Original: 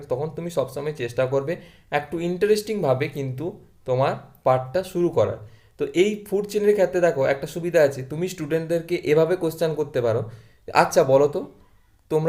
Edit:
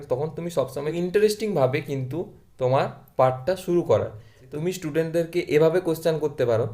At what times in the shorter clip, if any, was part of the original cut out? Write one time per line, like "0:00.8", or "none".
0:00.9
0:04.5